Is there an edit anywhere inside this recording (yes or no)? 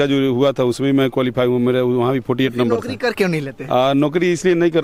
no